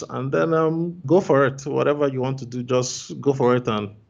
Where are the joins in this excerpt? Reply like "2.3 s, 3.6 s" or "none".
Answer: 1.0 s